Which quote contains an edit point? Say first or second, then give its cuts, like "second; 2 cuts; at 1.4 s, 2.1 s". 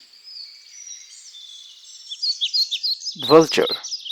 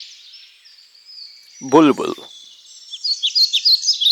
second; 2 cuts; at 1.2 s, 2.8 s